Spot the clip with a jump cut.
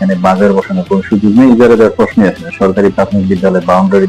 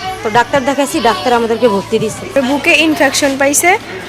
second; 1 cut; at 2.2 s

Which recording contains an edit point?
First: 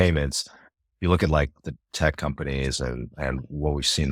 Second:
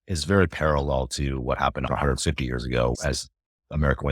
second; 2 cuts; at 1.8 s, 3.0 s

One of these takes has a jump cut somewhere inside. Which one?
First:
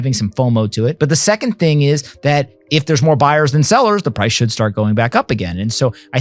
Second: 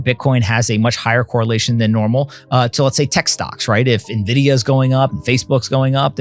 first; 1 cut; at 0.9 s

